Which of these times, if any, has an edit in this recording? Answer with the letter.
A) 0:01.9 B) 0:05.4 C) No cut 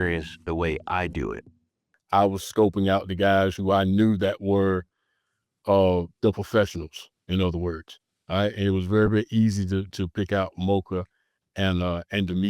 A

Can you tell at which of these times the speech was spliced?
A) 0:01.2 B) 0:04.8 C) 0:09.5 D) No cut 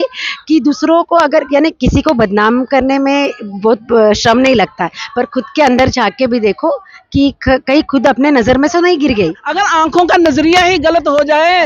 C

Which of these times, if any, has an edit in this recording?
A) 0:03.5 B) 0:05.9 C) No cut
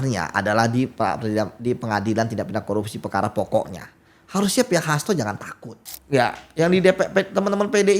B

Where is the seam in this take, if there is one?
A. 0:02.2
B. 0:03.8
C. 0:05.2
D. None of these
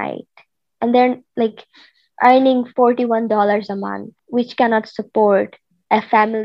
D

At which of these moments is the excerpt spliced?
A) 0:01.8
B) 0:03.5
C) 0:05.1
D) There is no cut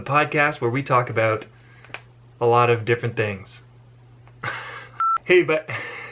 C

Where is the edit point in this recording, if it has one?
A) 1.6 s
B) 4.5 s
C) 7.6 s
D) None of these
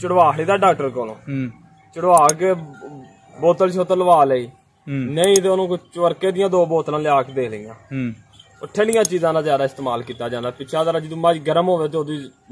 D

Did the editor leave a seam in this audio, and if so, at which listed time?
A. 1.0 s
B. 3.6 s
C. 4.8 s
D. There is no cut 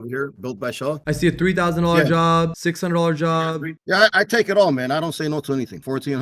A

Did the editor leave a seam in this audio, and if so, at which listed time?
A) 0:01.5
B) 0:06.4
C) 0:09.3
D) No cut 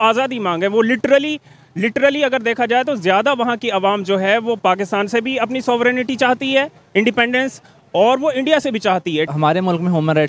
C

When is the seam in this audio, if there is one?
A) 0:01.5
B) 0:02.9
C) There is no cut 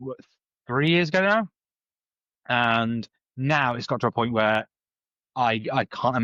C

